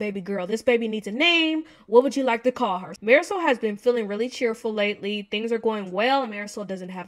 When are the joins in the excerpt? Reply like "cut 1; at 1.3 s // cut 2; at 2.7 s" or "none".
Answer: cut 1; at 2.9 s